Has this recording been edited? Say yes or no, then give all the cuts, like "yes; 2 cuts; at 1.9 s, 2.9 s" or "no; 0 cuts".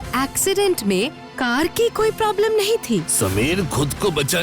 yes; 1 cut; at 3.1 s